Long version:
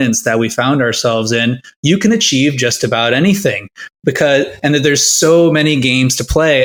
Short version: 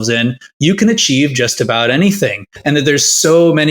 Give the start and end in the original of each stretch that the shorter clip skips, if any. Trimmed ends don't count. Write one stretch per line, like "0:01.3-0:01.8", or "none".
0:03.8-0:04.5

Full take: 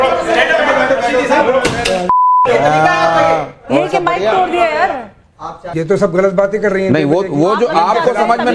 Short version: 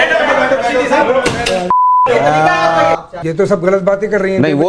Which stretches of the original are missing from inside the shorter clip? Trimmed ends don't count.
0:03.5-0:05.6

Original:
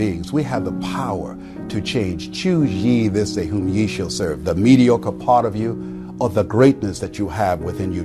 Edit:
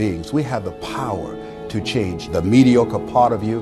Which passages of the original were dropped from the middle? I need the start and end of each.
0:02.3-0:04.4

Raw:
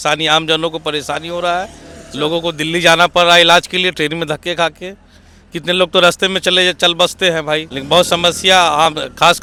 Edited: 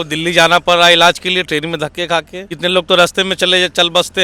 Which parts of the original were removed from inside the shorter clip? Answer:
0:04.9-0:05.5

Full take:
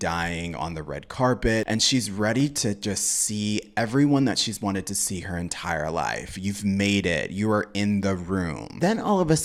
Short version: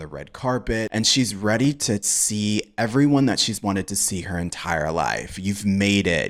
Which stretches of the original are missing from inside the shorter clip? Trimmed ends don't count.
0:02.9-0:03.1

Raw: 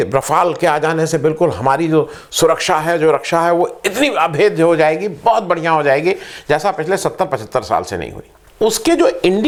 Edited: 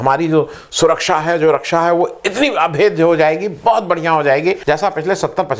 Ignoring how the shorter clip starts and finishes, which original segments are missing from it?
0:06.2-0:06.4

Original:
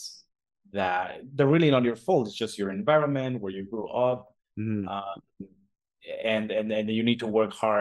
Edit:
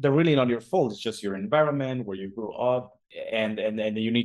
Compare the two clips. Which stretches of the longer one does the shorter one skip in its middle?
0:04.4-0:05.9

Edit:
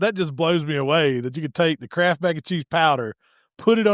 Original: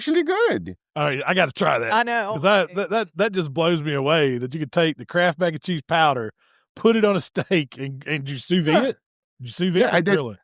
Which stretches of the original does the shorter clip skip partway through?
none

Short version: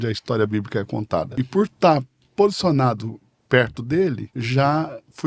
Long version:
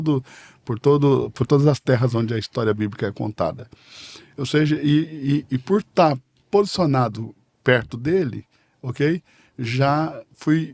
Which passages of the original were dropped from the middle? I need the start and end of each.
0:03.6-0:05.5
0:08.5-0:09.5

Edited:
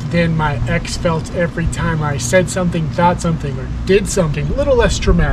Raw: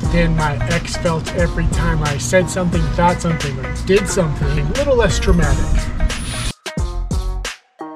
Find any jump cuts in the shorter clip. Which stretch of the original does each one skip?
0:04.4-0:04.6

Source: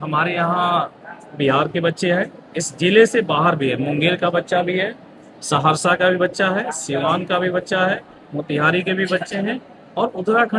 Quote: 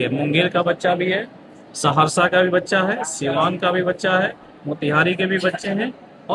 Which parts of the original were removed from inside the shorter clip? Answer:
none

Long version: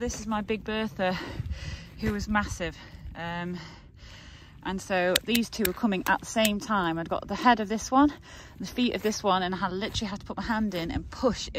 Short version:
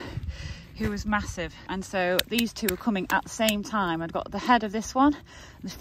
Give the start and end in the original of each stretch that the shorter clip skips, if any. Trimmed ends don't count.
0:02.8-0:04.5

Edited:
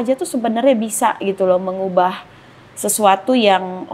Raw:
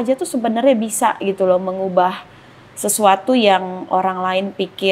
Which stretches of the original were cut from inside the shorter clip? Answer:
none

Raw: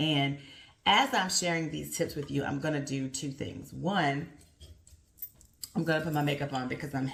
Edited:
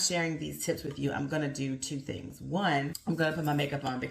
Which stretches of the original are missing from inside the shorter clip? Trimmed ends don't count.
0:04.3-0:05.7

